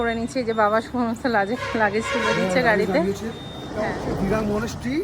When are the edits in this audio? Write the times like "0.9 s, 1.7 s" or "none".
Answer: 3.6 s